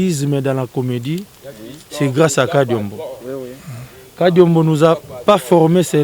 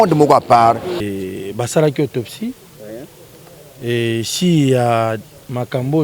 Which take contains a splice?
second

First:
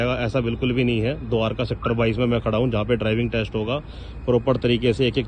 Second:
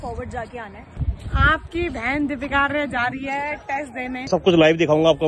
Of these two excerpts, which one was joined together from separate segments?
second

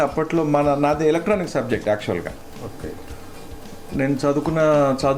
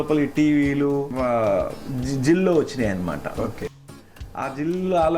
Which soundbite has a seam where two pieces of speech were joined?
second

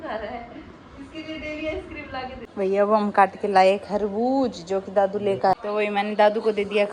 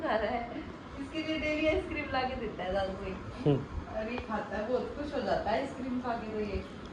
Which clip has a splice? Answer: first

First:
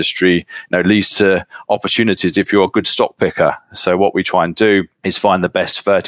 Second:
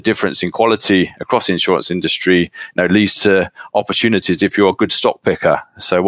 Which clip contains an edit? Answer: first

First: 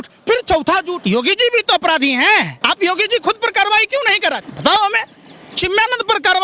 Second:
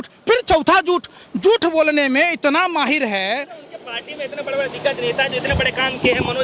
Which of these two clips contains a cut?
first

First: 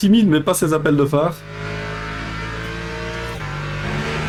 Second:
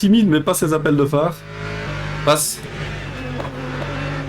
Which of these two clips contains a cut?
second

